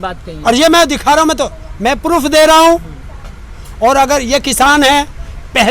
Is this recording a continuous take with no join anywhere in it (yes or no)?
yes